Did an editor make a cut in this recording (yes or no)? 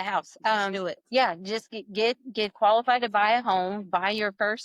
no